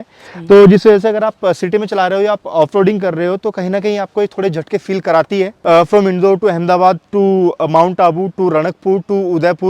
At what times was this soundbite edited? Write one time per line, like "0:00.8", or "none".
0:05.6